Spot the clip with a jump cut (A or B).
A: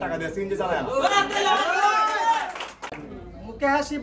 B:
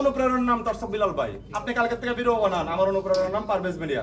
A